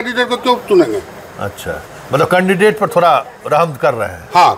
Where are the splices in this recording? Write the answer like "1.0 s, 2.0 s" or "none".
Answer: none